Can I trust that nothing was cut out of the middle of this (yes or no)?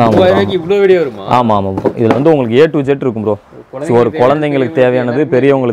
yes